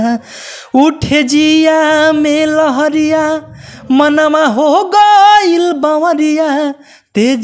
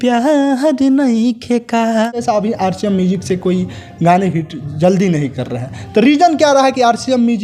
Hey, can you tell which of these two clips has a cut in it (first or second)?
second